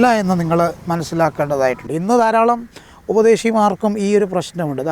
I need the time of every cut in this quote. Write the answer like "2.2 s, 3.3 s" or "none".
1.9 s

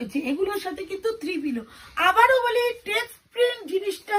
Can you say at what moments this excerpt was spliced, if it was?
none

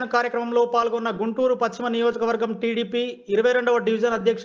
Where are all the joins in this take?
none

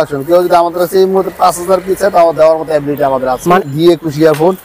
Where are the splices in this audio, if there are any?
3.6 s

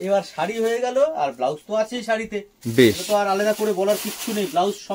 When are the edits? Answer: none

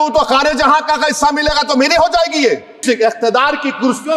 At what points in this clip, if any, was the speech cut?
2.8 s

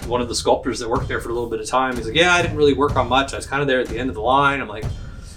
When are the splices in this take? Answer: none

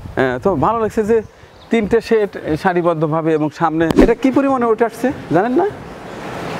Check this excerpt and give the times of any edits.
4.0 s

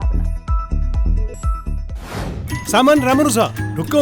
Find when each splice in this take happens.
2.5 s

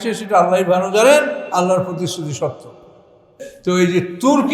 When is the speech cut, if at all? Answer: 3.5 s

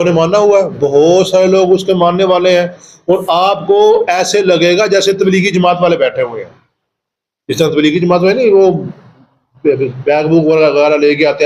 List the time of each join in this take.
none

